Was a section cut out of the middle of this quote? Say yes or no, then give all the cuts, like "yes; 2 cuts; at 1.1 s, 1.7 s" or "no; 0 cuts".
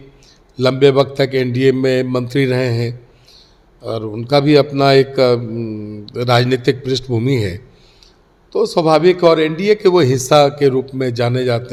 no; 0 cuts